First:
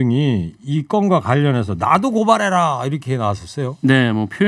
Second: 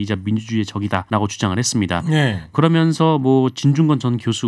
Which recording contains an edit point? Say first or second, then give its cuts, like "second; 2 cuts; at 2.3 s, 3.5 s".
second; 2 cuts; at 1.0 s, 2.5 s